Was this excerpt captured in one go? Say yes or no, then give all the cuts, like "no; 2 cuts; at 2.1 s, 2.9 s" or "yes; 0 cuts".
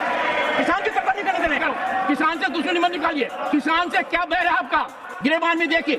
no; 3 cuts; at 1.6 s, 3.4 s, 5.0 s